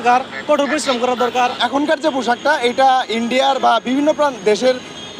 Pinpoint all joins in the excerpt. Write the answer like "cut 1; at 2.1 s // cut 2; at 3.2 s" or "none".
cut 1; at 1.6 s